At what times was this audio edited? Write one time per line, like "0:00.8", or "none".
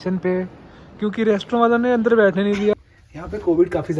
0:02.7